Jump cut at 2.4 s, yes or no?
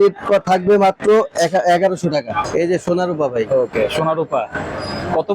yes